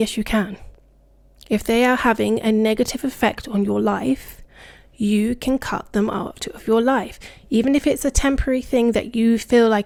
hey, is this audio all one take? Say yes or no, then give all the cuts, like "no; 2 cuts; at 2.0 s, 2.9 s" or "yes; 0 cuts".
yes; 0 cuts